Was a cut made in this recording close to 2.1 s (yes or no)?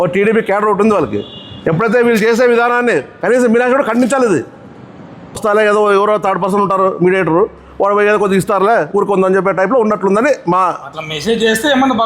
no